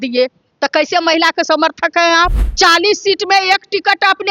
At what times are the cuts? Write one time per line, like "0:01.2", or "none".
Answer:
0:02.4